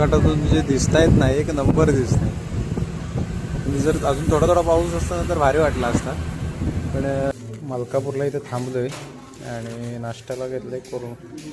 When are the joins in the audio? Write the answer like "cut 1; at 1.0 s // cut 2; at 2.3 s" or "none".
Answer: cut 1; at 7.3 s